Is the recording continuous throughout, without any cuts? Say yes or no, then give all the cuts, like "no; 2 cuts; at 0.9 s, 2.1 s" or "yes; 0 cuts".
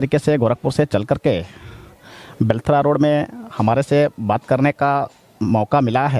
yes; 0 cuts